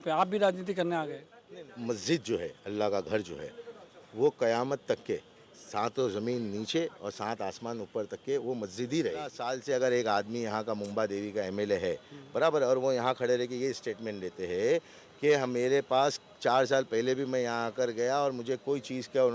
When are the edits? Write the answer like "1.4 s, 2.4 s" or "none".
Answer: 1.4 s, 9.5 s